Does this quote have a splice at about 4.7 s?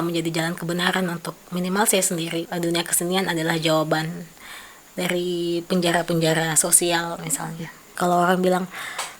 no; 2 cuts; at 2.5 s, 7.9 s

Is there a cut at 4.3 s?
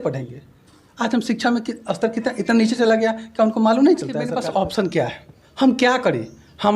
yes; 1 cut; at 4.3 s

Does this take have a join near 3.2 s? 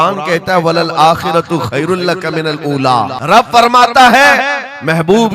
yes; 1 cut; at 3.2 s

